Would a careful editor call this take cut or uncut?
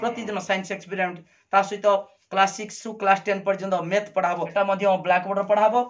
cut